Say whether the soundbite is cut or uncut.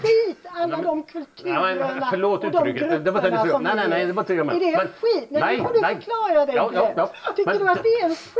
uncut